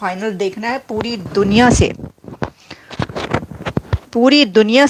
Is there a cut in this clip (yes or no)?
no